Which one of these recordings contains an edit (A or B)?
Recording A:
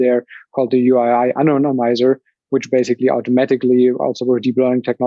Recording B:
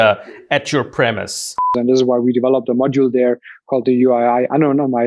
B